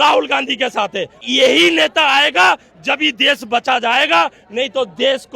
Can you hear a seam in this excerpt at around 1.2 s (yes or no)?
yes